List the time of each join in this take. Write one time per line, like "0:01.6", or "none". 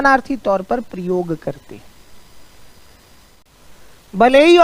0:03.4